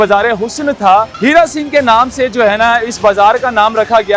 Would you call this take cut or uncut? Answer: cut